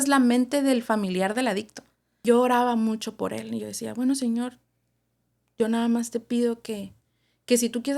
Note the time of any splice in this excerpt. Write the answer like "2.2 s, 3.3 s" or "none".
2.2 s

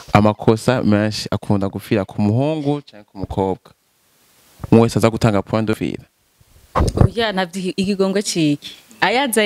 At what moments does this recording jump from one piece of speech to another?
5.8 s

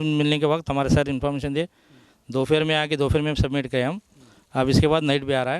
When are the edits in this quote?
none

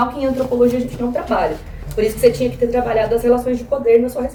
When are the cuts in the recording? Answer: none

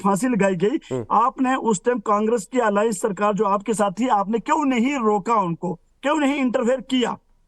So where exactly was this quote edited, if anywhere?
1.3 s

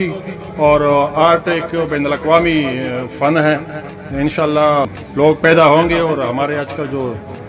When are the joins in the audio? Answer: 5.0 s

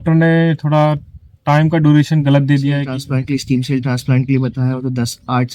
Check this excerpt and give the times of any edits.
2.9 s

